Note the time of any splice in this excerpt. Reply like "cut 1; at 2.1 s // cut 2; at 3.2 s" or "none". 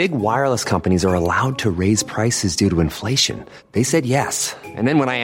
none